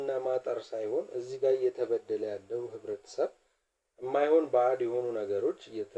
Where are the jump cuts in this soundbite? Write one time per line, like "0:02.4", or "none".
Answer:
none